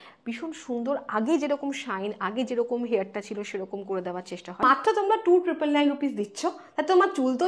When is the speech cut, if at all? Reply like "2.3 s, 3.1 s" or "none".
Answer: 4.4 s